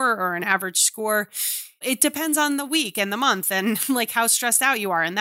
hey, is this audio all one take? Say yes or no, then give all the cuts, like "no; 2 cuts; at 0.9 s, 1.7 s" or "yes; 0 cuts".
no; 1 cut; at 1.6 s